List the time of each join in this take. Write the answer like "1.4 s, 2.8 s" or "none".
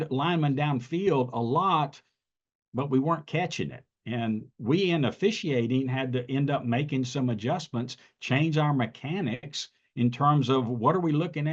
none